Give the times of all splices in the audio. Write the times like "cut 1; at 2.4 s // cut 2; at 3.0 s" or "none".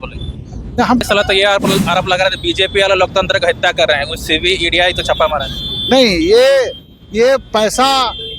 cut 1; at 1.0 s

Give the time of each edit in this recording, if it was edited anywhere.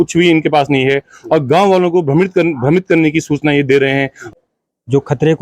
cut 1; at 4.2 s

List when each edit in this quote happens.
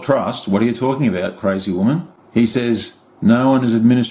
cut 1; at 2.2 s

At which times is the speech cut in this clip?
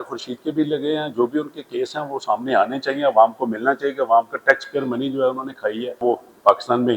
cut 1; at 6.0 s

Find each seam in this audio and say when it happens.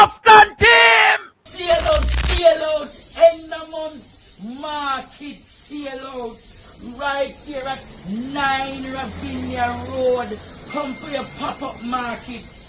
none

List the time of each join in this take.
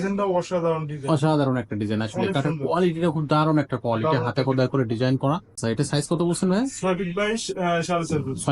cut 1; at 5.5 s

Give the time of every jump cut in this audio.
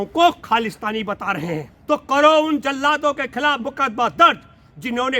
cut 1; at 1.7 s

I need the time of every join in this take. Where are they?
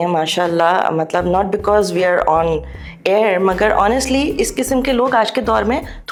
none

